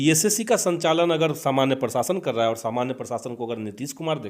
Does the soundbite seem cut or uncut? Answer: uncut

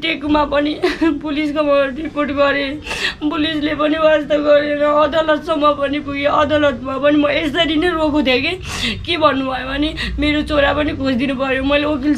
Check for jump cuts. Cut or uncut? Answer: uncut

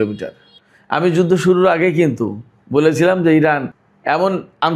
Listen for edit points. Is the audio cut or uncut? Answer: uncut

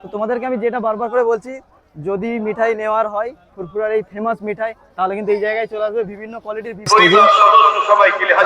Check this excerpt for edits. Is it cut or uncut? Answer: cut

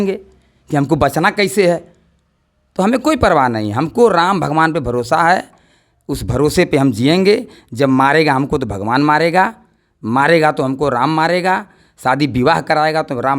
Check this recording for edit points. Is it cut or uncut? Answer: uncut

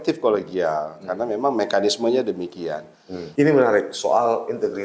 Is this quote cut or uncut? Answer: cut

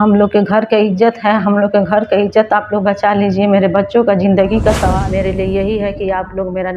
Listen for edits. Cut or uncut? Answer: cut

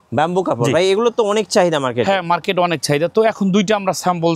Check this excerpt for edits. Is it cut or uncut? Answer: uncut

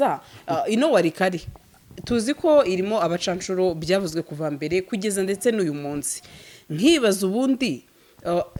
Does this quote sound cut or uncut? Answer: uncut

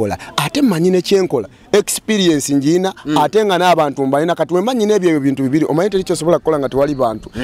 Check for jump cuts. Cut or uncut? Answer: uncut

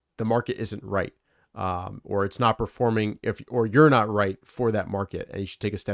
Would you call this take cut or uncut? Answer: uncut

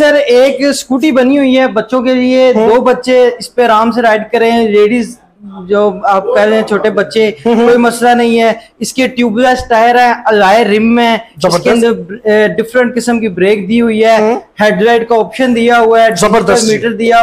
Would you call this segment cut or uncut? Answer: uncut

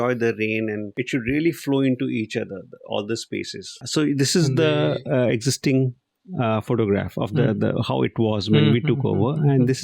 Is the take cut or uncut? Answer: cut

